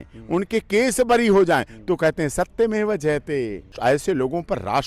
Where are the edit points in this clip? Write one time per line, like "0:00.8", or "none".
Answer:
0:03.8